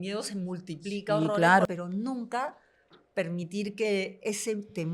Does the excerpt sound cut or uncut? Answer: cut